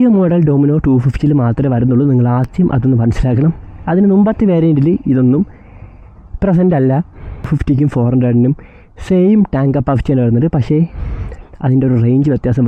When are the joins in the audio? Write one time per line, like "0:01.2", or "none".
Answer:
none